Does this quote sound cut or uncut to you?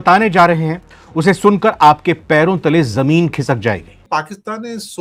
cut